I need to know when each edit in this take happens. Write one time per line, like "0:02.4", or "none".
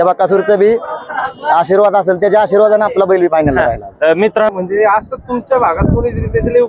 0:04.5